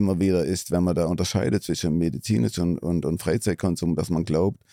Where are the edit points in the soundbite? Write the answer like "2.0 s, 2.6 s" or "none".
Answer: none